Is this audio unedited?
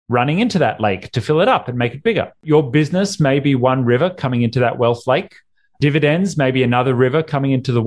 no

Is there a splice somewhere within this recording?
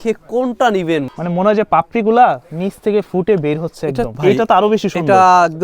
yes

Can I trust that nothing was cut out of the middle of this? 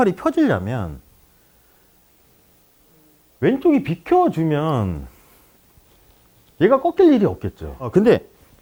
yes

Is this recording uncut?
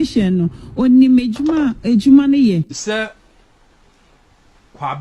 no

